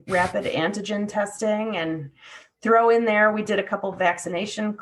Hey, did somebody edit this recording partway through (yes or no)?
no